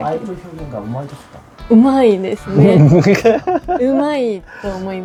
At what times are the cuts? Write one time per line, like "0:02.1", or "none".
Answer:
none